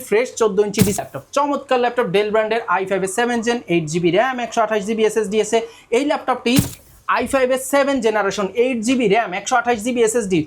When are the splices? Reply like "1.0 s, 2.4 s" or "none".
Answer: 1.0 s, 6.8 s